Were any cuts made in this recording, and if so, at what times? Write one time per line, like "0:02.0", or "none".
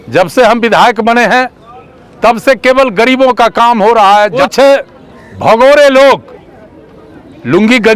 0:04.4